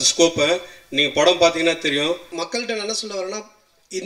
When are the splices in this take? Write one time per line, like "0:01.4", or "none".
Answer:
0:02.3